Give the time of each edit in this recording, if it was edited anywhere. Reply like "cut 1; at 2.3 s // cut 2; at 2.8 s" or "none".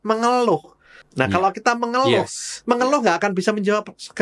cut 1; at 0.9 s